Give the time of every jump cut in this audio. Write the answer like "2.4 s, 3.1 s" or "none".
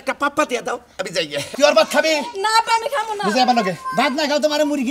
1.4 s